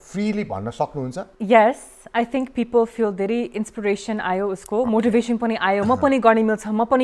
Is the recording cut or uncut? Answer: cut